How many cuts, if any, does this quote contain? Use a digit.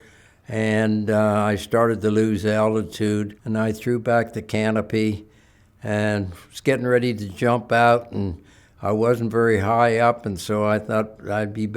1